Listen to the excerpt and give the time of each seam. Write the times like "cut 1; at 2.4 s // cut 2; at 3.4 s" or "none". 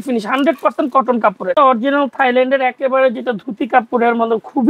cut 1; at 1.6 s

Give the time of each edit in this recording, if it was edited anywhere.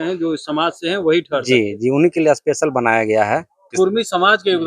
cut 1; at 3.6 s

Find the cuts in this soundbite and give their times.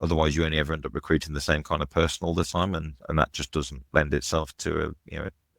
cut 1; at 4.5 s

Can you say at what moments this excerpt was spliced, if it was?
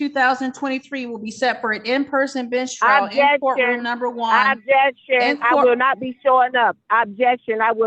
none

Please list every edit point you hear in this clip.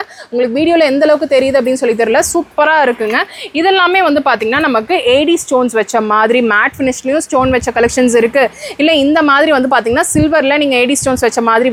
none

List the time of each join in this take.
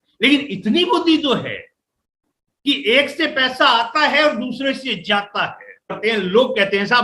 cut 1; at 6.0 s

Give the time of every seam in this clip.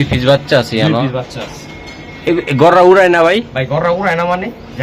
none

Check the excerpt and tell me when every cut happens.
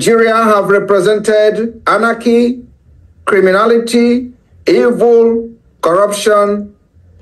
none

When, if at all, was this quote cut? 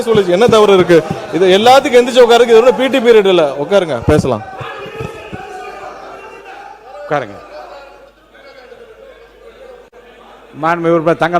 none

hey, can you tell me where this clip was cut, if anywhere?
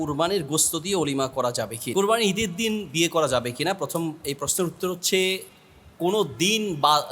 none

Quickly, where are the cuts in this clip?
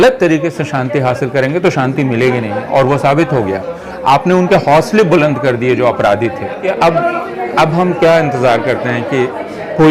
cut 1; at 6.6 s

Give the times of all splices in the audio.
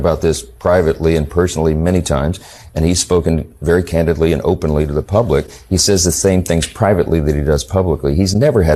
none

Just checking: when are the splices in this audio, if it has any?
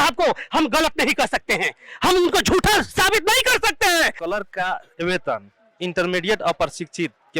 cut 1; at 4.2 s

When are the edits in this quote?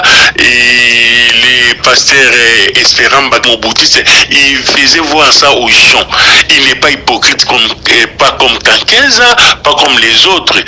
cut 1; at 3.4 s

